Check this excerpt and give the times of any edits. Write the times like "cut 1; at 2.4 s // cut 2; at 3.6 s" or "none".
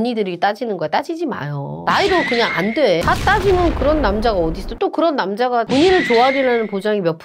cut 1; at 3.0 s